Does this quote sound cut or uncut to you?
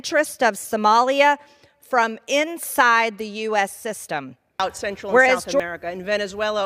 cut